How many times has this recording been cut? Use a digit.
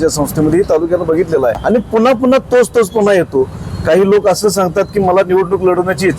1